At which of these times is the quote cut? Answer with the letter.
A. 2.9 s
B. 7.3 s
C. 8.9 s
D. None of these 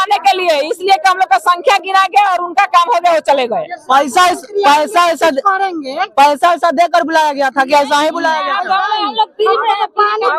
D